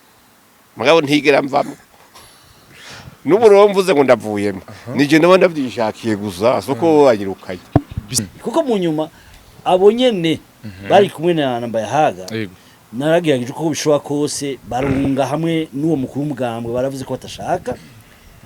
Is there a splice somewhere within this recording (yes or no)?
yes